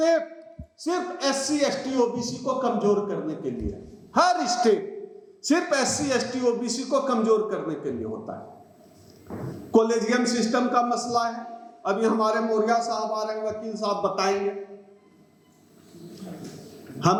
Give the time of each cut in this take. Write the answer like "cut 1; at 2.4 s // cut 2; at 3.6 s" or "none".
none